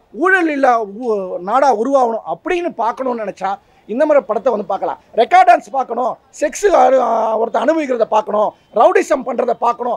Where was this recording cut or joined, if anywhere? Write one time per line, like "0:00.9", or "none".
none